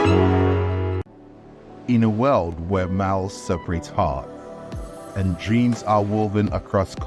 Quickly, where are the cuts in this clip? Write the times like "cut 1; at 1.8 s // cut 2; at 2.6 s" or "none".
cut 1; at 1.1 s